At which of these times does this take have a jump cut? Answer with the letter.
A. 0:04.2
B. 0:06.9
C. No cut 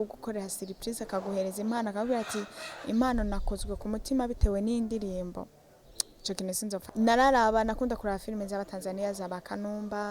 B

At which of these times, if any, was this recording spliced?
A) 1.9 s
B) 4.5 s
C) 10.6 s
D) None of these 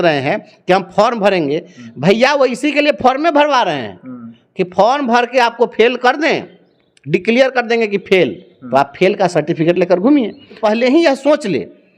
C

